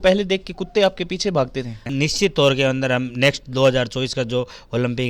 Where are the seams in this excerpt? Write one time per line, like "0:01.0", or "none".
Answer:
0:01.9